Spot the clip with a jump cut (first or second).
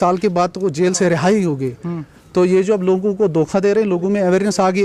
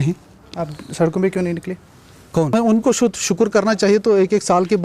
second